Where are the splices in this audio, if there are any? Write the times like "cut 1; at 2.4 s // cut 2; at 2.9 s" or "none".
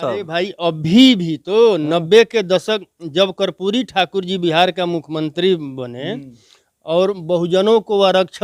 none